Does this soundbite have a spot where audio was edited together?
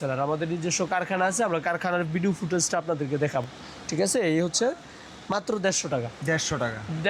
no; 0 cuts

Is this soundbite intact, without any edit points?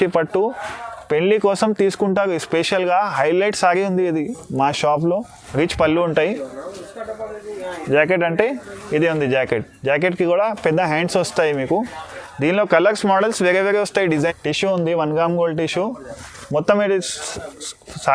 no; 2 cuts; at 5.4 s, 14.1 s

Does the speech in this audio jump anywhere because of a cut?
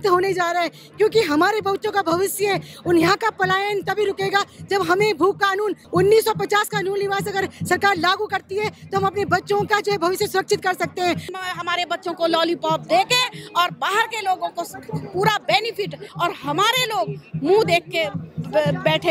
yes; 3 cuts; at 5.8 s, 11.3 s, 16.0 s

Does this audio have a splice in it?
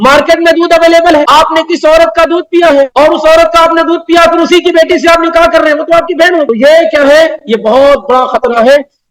yes; 3 cuts; at 1.3 s, 2.9 s, 6.5 s

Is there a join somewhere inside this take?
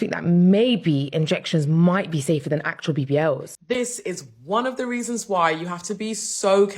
yes; 1 cut; at 3.5 s

